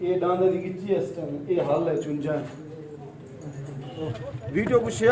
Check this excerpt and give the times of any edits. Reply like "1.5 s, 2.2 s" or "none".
4.1 s

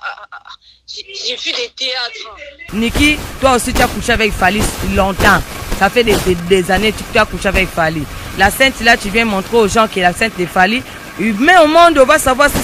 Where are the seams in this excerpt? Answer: 2.6 s

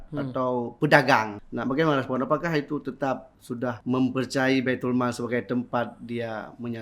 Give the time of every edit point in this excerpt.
1.4 s, 3.4 s

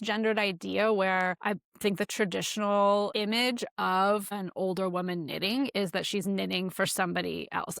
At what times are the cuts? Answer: 1.4 s, 3.1 s, 4.3 s

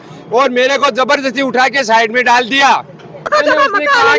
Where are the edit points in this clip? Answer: 3.3 s

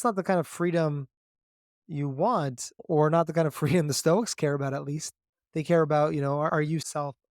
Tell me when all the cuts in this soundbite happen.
2.7 s, 6.6 s

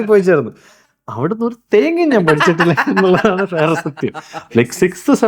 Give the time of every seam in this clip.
none

